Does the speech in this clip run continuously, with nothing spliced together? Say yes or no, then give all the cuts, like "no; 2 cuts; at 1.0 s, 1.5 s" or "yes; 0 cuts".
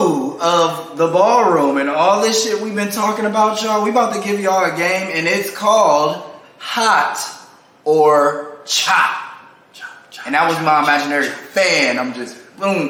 yes; 0 cuts